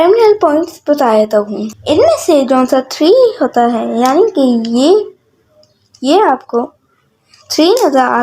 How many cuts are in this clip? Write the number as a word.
one